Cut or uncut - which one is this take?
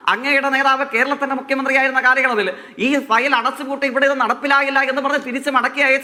uncut